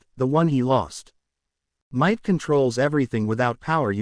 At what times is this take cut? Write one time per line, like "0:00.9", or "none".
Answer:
0:01.7